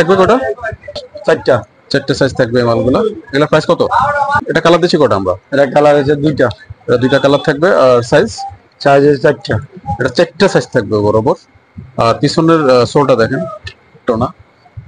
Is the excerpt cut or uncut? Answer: cut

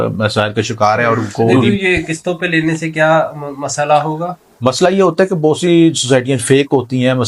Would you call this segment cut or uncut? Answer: cut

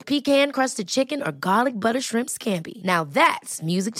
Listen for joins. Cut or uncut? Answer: uncut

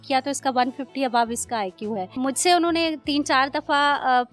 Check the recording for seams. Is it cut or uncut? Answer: cut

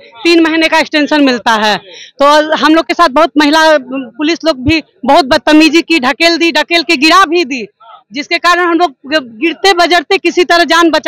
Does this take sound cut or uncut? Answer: uncut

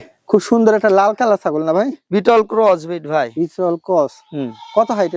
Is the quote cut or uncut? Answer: uncut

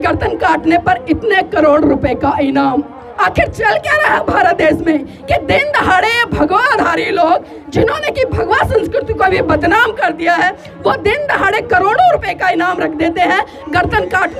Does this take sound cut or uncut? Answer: uncut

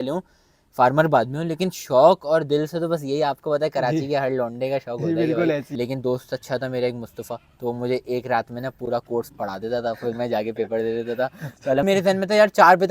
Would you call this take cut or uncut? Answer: cut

